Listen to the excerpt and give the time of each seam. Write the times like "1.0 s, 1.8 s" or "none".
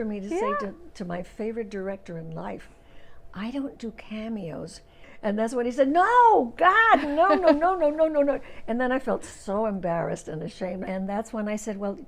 5.2 s, 10.9 s